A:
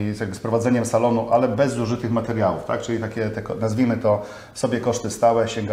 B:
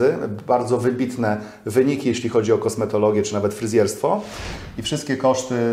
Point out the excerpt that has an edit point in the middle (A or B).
B